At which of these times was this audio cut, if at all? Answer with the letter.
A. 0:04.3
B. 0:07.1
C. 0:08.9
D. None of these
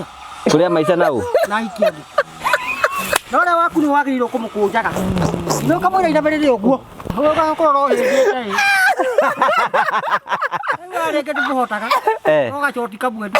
B